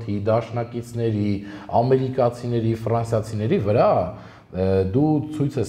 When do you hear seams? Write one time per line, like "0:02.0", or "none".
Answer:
none